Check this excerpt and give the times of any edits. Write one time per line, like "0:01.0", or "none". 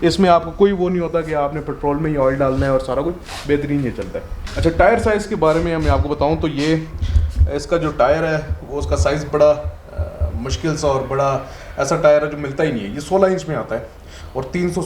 none